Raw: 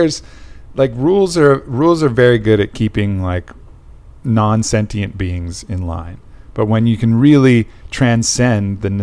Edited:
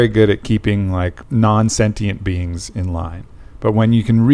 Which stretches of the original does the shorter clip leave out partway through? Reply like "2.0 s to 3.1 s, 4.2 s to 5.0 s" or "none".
3.5 s to 4.1 s